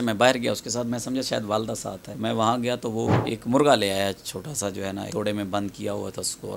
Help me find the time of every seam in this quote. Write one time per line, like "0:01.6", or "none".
0:02.1
0:03.2
0:05.1